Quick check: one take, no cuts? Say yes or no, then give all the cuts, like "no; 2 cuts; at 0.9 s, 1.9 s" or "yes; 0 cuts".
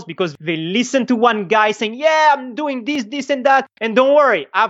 yes; 0 cuts